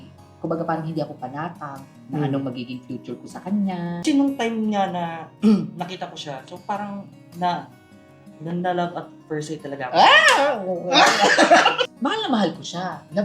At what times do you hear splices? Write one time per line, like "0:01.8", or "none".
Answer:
0:04.0
0:11.9